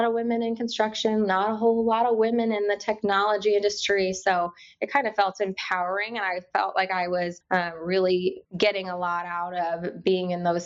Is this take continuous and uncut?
no; 2 cuts; at 7.4 s, 8.5 s

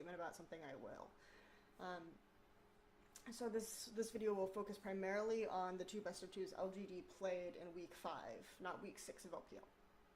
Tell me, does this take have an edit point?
yes; 1 cut; at 5.5 s

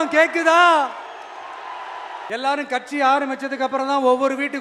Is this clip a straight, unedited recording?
no; 1 cut; at 2.3 s

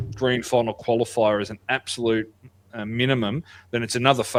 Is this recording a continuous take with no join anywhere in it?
yes; 0 cuts

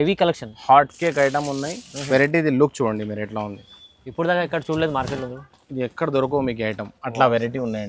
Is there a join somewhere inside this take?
no; 0 cuts

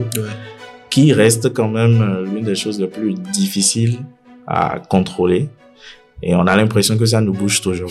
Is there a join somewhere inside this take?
no; 0 cuts

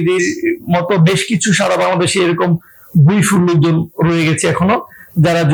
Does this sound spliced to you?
no; 0 cuts

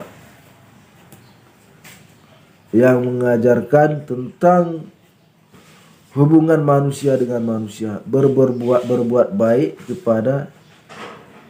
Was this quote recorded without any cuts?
yes; 0 cuts

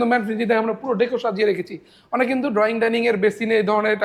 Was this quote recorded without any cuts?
yes; 0 cuts

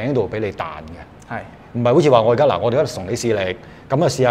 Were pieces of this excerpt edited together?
no; 0 cuts

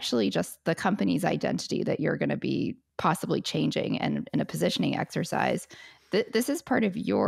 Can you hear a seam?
yes; 1 cut; at 2.8 s

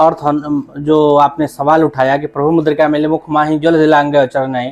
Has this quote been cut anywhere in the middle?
no; 0 cuts

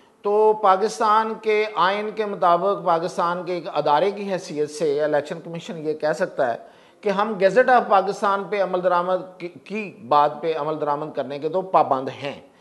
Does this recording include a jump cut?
no; 0 cuts

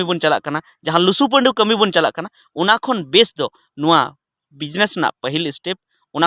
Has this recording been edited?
no; 0 cuts

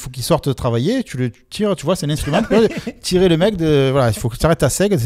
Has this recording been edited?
no; 0 cuts

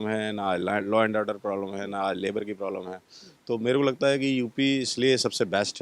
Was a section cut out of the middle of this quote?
no; 0 cuts

